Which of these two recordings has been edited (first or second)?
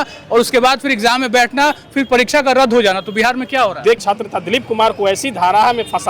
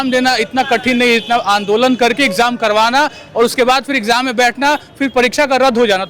first